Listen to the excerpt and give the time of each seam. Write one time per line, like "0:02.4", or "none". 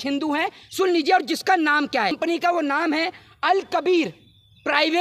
0:02.2